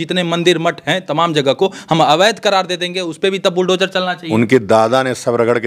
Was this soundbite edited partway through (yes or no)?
no